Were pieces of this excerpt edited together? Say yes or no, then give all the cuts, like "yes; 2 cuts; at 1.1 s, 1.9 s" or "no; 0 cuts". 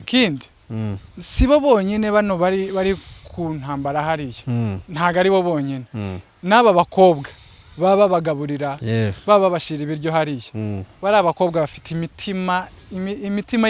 no; 0 cuts